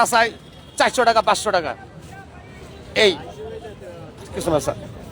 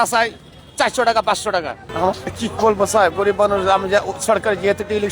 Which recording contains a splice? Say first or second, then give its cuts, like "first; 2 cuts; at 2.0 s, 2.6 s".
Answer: second; 1 cut; at 1.8 s